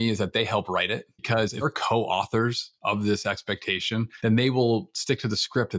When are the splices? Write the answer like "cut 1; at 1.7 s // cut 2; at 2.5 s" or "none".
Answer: cut 1; at 1.6 s // cut 2; at 4.1 s